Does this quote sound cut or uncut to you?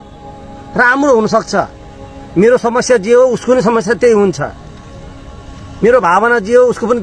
uncut